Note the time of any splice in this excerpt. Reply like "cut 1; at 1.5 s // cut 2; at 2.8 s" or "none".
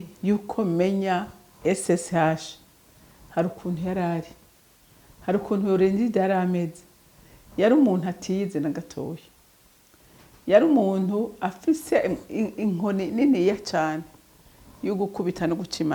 none